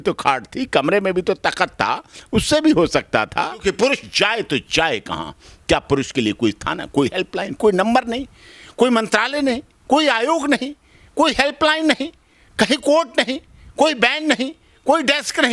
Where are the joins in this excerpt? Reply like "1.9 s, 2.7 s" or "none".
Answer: 3.6 s